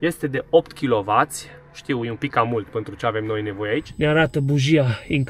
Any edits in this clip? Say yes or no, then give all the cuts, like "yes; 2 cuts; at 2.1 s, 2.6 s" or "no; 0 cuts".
yes; 1 cut; at 3.9 s